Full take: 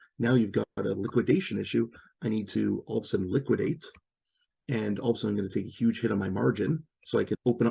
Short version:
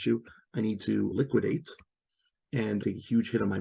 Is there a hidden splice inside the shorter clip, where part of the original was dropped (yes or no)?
yes